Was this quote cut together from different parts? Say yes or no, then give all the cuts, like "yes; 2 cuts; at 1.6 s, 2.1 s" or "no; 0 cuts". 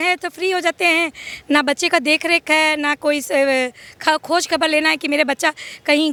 no; 0 cuts